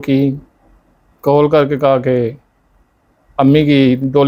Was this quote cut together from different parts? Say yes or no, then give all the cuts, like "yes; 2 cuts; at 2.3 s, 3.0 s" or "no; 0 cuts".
no; 0 cuts